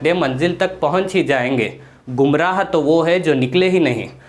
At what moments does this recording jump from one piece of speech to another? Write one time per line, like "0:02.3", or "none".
none